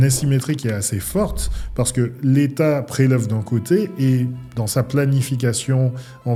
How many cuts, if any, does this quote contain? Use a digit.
0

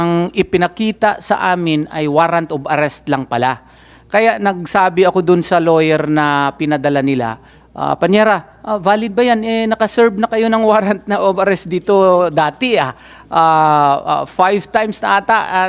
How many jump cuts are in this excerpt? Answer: 0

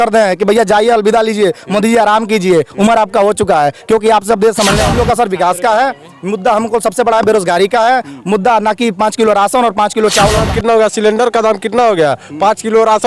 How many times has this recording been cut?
2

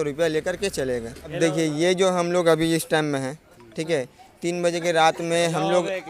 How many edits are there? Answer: 1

